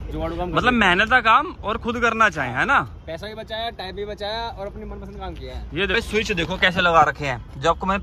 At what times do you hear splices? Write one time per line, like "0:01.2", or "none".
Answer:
0:05.9